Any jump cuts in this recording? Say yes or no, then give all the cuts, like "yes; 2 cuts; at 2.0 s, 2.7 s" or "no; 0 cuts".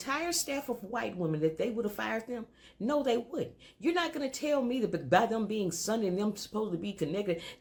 no; 0 cuts